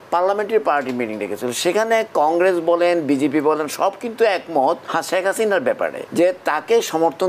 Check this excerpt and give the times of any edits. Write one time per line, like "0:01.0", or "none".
0:04.8
0:06.0